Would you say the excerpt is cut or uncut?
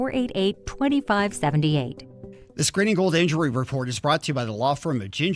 cut